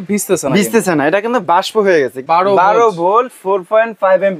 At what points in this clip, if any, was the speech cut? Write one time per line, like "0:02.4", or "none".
0:02.2